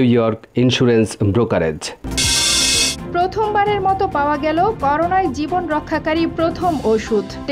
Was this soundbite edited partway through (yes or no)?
yes